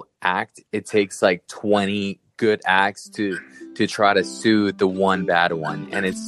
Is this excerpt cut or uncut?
uncut